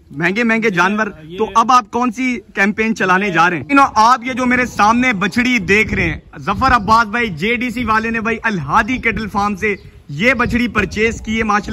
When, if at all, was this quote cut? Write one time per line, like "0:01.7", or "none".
0:03.6